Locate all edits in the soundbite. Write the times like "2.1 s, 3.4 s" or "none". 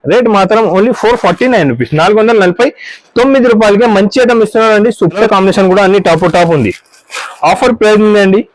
5.2 s